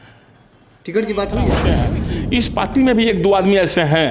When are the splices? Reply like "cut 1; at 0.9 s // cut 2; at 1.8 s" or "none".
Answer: cut 1; at 1.7 s